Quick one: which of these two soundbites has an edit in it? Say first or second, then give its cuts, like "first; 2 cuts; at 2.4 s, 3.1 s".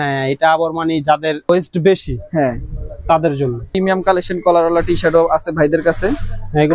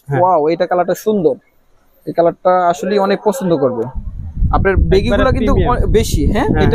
first; 2 cuts; at 1.5 s, 3.7 s